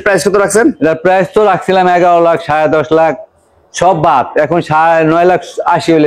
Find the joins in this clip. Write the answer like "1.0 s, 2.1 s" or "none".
none